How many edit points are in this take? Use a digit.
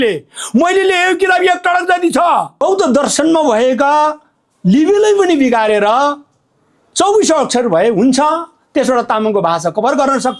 1